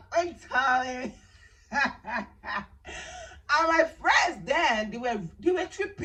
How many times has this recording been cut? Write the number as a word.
zero